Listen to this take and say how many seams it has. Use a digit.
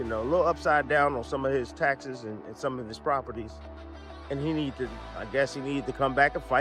0